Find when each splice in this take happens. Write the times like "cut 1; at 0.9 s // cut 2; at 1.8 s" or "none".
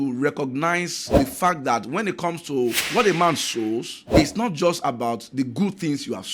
cut 1; at 1.0 s // cut 2; at 2.8 s // cut 3; at 4.0 s